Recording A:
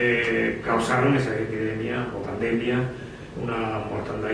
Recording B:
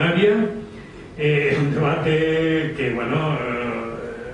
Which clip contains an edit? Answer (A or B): B